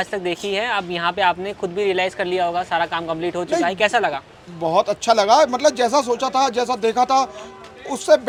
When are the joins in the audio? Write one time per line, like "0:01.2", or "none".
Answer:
none